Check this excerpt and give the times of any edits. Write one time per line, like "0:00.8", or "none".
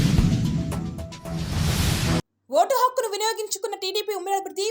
0:02.3